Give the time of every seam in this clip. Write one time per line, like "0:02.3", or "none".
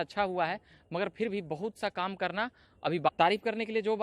0:03.1